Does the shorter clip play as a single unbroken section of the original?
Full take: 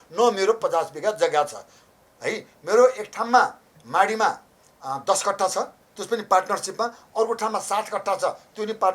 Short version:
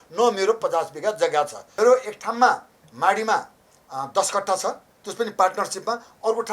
no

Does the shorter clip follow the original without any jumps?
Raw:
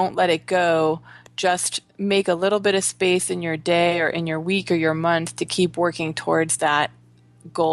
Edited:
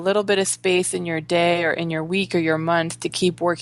yes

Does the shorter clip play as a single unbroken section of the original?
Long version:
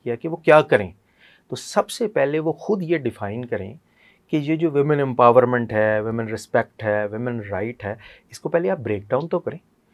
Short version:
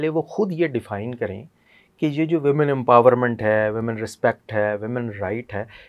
yes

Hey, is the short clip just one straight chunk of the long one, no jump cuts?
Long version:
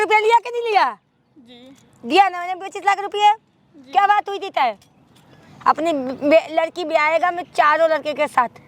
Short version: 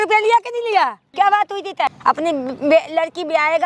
no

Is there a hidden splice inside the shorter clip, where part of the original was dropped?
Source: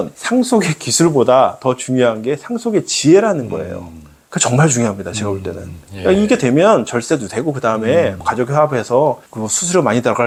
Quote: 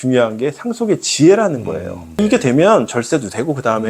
yes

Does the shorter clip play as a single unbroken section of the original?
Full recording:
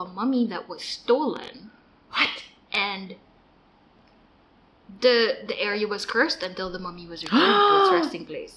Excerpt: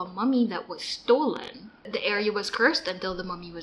no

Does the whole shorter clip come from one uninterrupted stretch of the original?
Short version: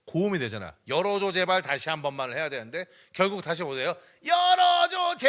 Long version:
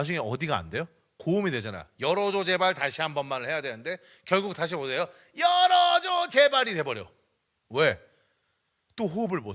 yes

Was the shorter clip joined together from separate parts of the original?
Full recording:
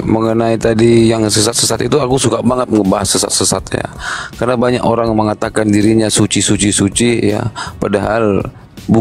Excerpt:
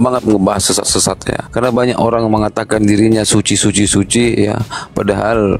yes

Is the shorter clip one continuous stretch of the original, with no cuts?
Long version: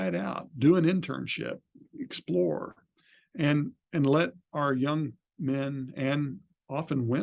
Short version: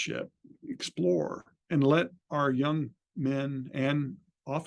no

